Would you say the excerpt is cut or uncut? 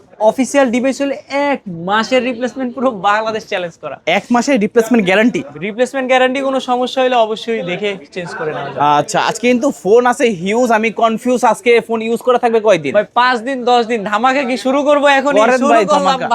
uncut